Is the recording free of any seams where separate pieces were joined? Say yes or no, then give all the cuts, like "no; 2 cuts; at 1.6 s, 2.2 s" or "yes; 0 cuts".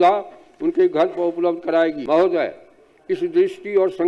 no; 1 cut; at 2.0 s